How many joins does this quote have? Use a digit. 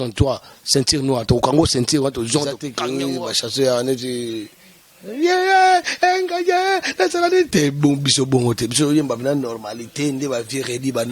1